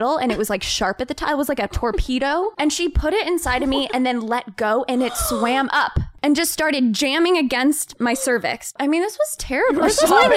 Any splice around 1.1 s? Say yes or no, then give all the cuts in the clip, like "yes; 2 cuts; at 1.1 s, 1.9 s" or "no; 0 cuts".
no; 3 cuts; at 2.5 s, 6.0 s, 8.7 s